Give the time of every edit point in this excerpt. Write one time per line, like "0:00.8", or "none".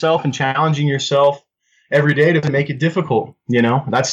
none